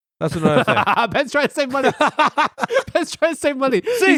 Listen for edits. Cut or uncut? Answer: uncut